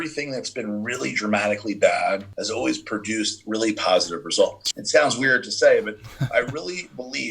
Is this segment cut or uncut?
cut